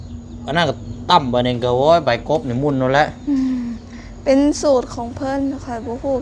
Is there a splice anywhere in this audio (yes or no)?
no